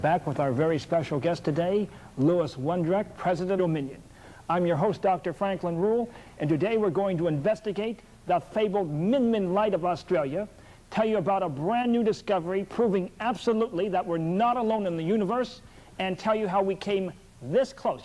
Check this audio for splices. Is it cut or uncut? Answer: uncut